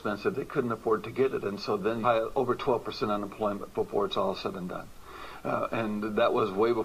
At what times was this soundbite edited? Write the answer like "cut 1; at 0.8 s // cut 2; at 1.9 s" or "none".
none